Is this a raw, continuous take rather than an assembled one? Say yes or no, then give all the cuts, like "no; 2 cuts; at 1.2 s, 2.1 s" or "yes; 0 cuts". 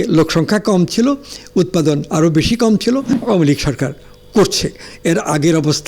no; 1 cut; at 3.1 s